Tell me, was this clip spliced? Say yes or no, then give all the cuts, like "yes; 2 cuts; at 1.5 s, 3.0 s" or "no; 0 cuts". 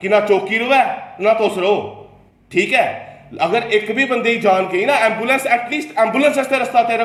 no; 0 cuts